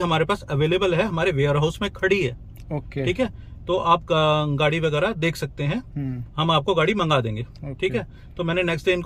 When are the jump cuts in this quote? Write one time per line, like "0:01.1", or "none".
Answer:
none